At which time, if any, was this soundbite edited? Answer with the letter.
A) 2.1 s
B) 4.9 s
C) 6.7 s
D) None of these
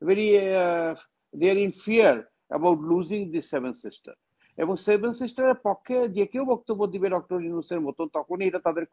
D